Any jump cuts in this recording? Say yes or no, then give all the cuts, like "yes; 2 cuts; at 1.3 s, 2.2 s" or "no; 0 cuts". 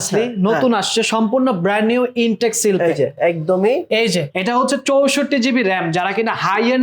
yes; 1 cut; at 4.3 s